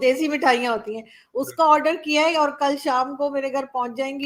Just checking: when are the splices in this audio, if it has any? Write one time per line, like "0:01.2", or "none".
none